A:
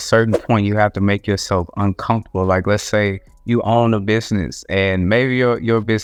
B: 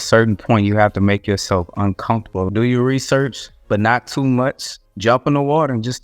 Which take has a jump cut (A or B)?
B